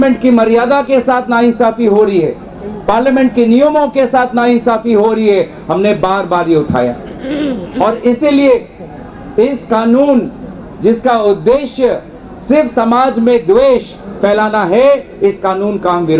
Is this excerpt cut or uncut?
uncut